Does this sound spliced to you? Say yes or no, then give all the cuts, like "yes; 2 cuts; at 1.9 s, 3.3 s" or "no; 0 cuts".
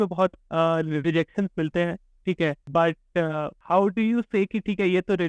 yes; 2 cuts; at 2.6 s, 3.5 s